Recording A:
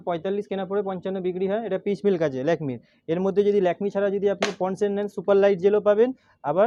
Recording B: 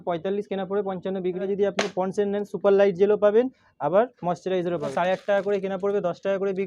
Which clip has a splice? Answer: B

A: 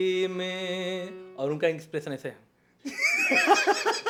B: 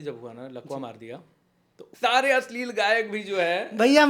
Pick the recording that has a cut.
B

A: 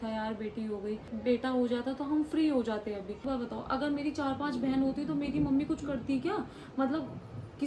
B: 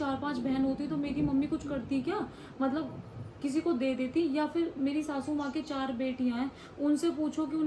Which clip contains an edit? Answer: A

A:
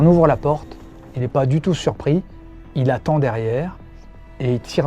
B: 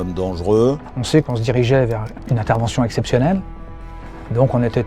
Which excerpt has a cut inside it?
B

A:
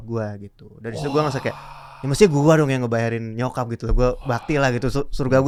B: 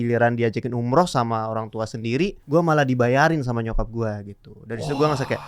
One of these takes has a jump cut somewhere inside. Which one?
B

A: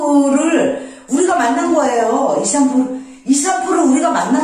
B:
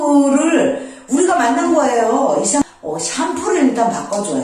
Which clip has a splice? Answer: B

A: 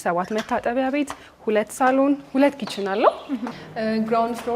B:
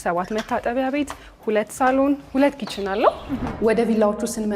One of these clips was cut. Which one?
B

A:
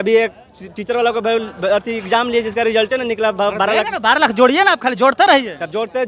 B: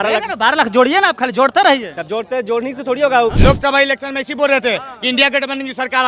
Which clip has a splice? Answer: B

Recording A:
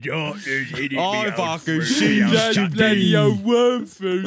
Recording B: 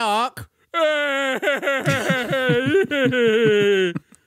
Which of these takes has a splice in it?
A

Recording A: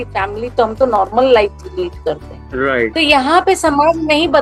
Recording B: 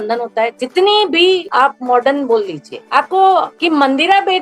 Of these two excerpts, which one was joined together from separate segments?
B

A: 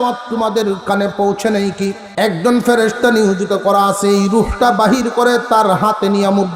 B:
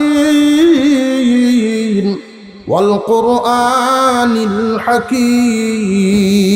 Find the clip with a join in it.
A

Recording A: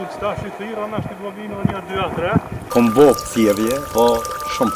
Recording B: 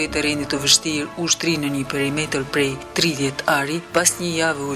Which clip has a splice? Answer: A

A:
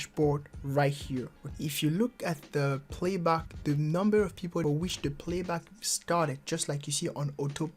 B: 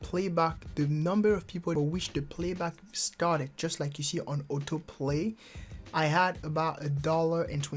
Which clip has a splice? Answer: A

